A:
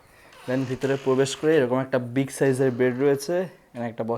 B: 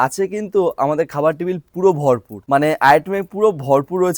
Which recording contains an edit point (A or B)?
B